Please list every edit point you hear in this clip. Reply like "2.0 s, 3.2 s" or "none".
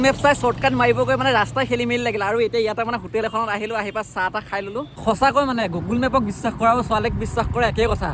4.9 s